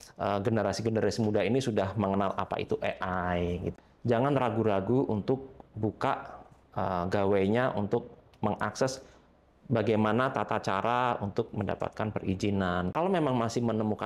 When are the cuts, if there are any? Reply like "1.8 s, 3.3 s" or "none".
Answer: 3.7 s, 12.9 s